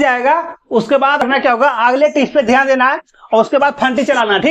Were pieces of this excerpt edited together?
yes; 1 cut; at 1.2 s

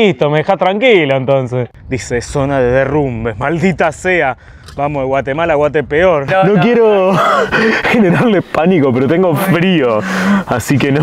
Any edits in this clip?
yes; 2 cuts; at 1.6 s, 6.3 s

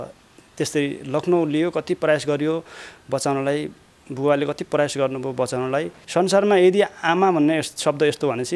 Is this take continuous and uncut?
no; 1 cut; at 5.9 s

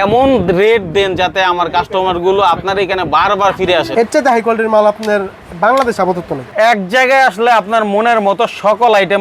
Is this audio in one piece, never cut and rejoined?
no; 2 cuts; at 3.9 s, 6.5 s

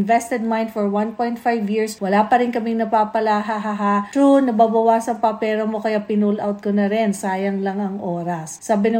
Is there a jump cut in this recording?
no; 0 cuts

